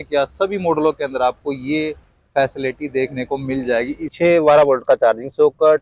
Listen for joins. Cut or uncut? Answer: cut